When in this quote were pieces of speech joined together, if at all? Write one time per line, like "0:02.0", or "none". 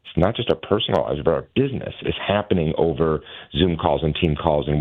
none